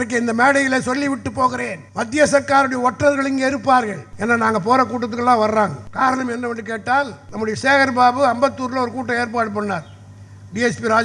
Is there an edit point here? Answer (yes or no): yes